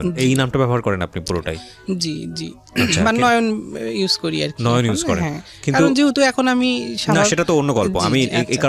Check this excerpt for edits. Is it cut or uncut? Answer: uncut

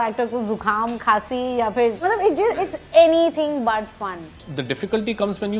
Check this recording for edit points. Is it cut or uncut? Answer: cut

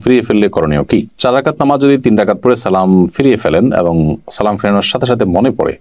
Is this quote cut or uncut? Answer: uncut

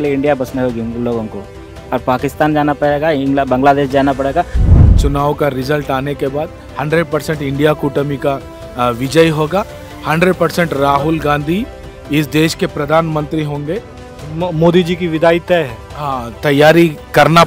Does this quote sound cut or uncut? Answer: cut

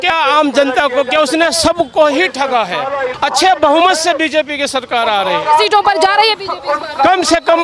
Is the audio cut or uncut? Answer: cut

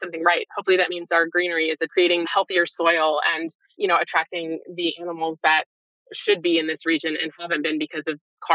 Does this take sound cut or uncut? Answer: cut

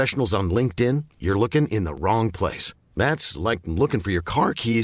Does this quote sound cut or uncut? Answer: uncut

